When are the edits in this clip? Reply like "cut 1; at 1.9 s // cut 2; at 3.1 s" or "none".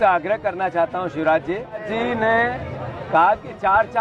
cut 1; at 1.9 s